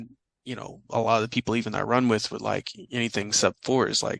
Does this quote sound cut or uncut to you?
uncut